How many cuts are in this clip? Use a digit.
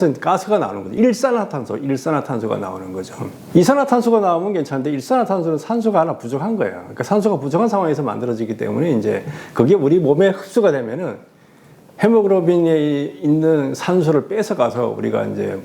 0